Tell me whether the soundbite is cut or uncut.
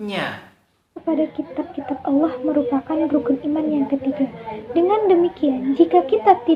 cut